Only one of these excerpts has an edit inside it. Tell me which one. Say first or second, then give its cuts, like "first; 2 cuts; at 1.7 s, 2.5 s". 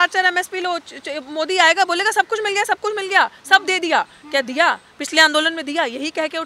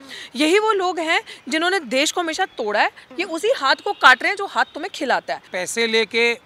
second; 2 cuts; at 3.0 s, 5.5 s